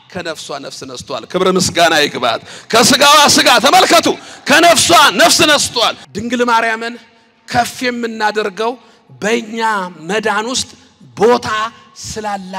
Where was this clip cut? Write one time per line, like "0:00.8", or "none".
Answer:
0:06.0